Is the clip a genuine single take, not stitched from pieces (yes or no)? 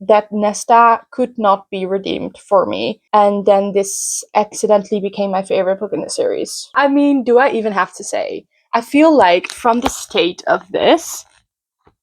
no